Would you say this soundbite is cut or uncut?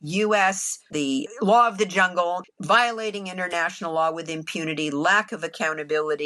uncut